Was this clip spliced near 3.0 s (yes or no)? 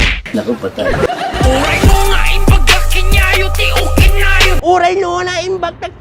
no